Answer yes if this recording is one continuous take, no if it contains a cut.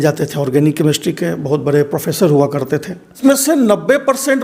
no